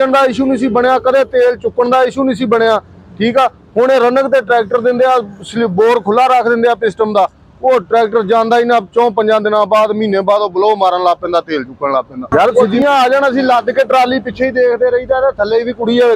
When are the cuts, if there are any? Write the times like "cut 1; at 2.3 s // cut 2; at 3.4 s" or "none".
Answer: cut 1; at 12.7 s